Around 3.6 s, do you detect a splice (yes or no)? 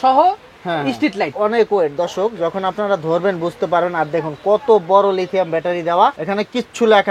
no